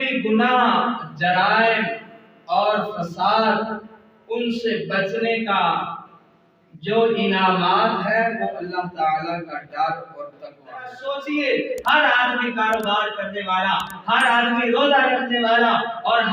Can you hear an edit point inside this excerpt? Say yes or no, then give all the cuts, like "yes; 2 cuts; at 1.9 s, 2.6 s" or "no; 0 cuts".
yes; 1 cut; at 11.0 s